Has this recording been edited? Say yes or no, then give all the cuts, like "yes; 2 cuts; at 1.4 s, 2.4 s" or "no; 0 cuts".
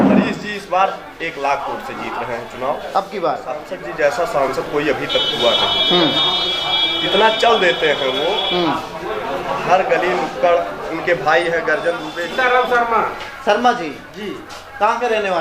yes; 2 cuts; at 3.7 s, 12.1 s